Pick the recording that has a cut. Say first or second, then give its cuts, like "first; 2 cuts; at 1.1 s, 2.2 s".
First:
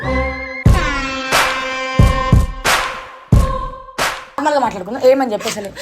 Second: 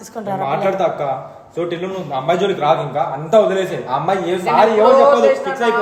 first; 1 cut; at 4.4 s